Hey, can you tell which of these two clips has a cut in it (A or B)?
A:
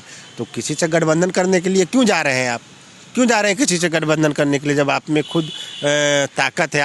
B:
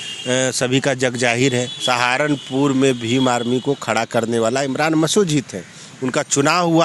B